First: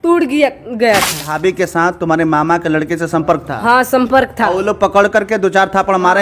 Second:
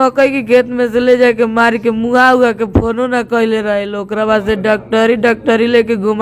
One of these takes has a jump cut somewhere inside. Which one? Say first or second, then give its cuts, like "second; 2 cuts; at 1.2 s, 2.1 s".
first; 1 cut; at 1.3 s